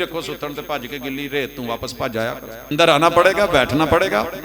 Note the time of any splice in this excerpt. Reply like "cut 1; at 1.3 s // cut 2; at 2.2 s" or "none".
cut 1; at 2.7 s